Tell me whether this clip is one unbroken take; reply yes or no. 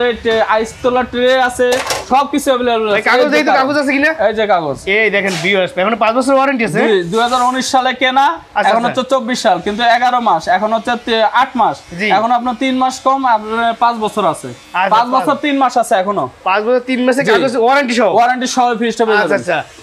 yes